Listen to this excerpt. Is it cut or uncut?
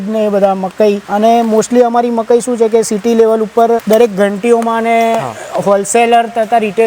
cut